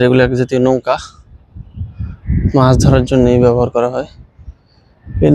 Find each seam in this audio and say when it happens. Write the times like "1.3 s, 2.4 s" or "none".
none